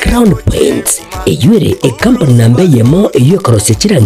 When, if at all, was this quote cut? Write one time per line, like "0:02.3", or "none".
none

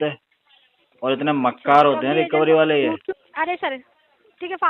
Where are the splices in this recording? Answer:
0:03.3

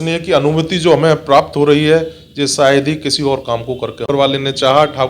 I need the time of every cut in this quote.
0:04.1

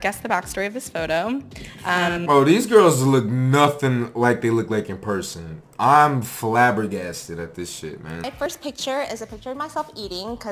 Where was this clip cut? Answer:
0:08.5

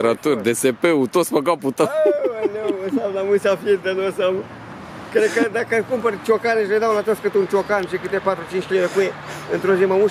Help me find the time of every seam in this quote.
none

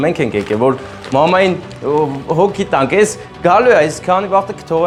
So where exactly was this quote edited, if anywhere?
none

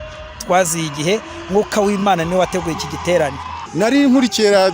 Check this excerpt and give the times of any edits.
0:03.6

